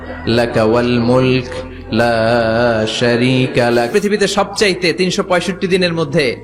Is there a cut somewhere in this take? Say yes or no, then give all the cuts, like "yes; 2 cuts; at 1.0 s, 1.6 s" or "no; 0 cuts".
yes; 1 cut; at 3.9 s